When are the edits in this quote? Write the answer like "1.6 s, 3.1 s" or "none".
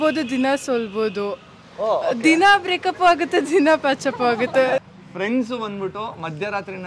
4.8 s